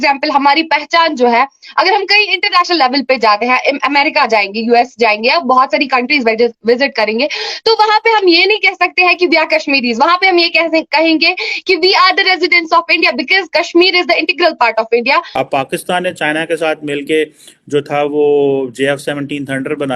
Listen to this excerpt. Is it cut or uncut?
cut